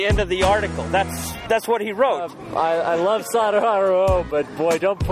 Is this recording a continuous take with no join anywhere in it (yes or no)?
no